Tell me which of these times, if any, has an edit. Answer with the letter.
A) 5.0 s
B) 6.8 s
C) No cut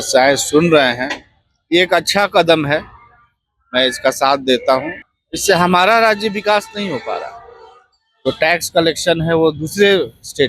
A